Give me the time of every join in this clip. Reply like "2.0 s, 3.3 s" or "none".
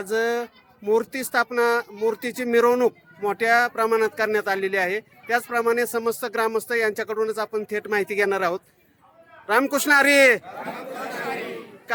none